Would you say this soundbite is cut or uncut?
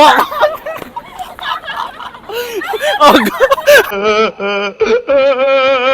cut